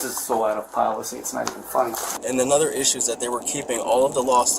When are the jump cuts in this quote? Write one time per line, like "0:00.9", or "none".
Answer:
0:02.1